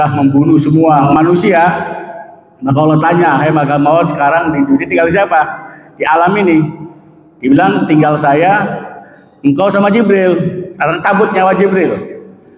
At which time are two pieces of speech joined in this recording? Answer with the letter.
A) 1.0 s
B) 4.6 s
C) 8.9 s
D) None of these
A